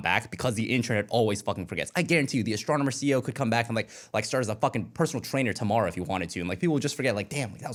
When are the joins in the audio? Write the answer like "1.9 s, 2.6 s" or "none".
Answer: none